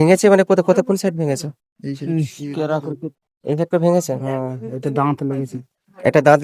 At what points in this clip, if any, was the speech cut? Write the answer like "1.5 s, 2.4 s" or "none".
none